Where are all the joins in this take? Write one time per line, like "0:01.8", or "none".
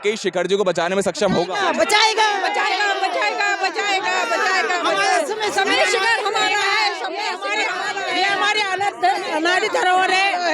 none